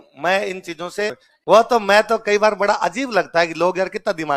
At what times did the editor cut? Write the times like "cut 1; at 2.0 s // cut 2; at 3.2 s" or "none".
cut 1; at 1.3 s